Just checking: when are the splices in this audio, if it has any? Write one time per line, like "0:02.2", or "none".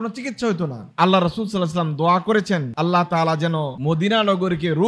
0:00.9